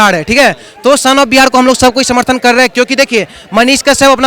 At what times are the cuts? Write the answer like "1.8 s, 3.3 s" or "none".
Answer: none